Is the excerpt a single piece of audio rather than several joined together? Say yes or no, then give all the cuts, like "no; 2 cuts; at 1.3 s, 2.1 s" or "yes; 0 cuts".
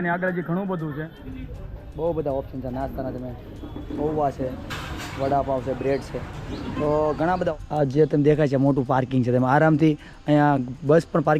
no; 2 cuts; at 1.4 s, 7.5 s